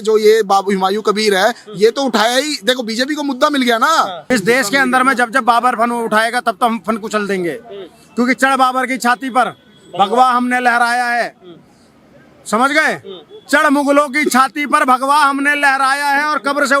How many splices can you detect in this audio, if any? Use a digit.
1